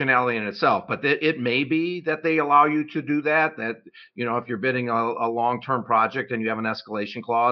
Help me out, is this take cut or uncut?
uncut